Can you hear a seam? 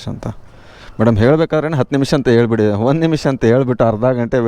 no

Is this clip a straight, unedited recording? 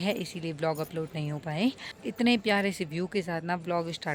no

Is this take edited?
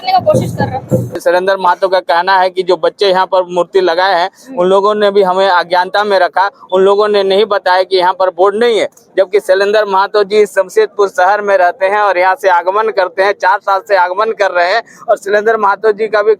yes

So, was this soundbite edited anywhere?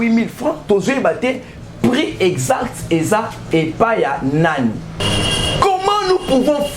yes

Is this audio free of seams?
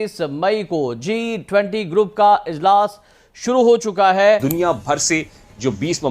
no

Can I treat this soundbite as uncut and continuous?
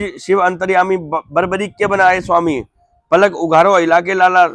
yes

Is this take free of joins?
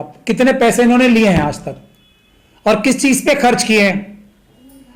yes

